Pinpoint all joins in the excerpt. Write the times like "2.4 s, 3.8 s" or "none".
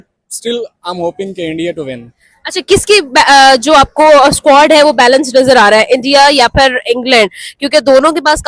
none